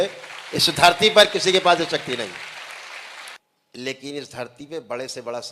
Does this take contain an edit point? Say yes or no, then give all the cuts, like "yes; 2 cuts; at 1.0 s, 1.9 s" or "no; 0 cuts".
yes; 1 cut; at 3.4 s